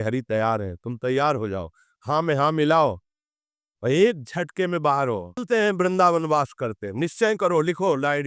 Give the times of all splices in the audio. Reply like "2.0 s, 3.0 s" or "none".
5.4 s